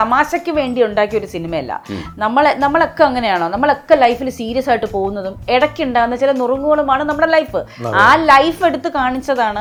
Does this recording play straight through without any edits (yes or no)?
yes